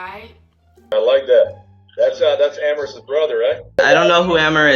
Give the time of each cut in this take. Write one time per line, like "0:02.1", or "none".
0:03.6